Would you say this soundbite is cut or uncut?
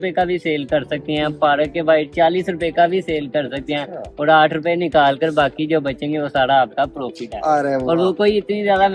uncut